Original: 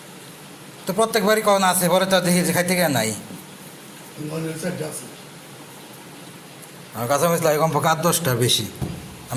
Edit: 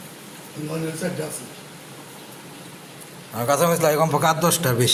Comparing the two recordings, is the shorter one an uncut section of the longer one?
yes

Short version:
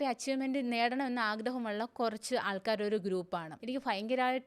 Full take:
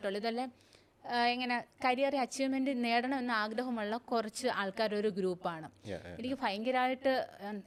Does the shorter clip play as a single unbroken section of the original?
no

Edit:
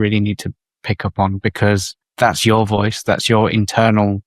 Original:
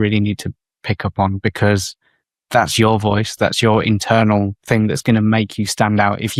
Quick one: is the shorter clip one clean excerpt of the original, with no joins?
no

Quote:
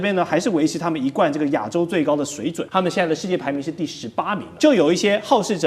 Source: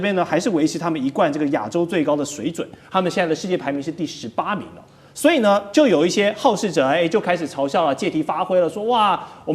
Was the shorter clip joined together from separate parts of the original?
yes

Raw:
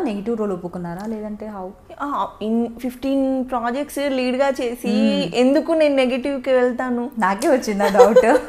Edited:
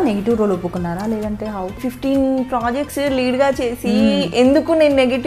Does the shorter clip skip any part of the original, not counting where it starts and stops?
yes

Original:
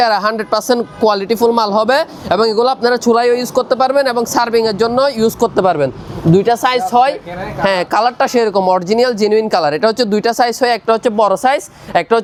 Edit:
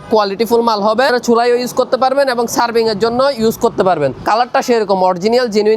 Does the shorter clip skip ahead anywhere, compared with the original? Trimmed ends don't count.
yes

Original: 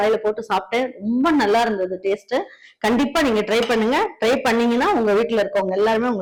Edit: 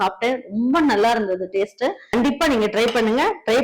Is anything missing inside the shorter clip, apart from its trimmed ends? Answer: yes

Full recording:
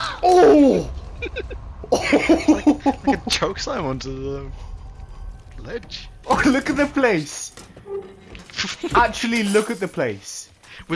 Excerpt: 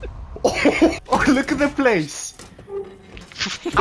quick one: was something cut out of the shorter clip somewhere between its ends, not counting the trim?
yes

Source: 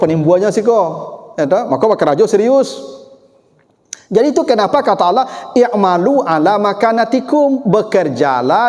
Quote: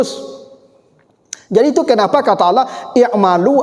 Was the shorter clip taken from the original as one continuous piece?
yes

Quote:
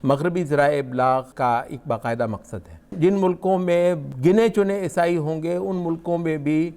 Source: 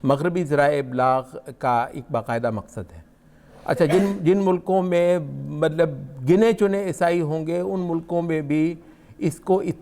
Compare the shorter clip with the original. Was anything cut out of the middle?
yes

